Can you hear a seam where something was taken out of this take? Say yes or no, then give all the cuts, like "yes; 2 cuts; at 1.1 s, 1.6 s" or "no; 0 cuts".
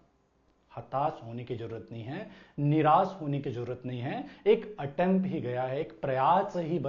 no; 0 cuts